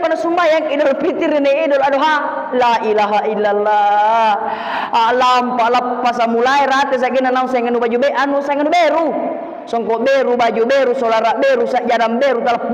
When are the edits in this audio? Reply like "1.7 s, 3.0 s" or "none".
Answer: none

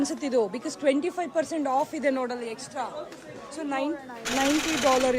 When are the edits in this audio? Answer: none

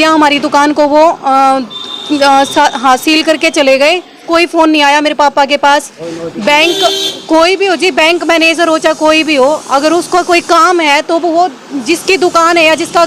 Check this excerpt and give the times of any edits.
4.2 s

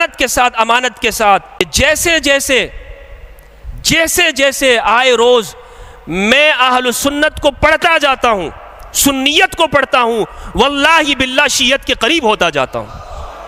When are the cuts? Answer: 1.6 s

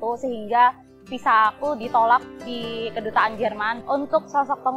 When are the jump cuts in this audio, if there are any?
3.8 s

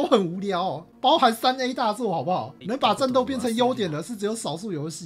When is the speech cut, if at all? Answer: 2.6 s

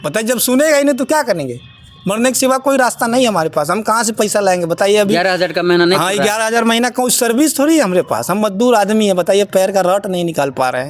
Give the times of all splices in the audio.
none

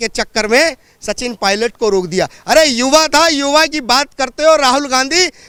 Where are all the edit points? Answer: none

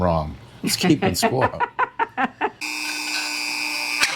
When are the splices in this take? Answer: 2.6 s

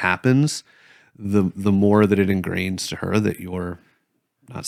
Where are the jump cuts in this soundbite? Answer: none

